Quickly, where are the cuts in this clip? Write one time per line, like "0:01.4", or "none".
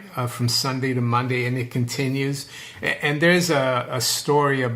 none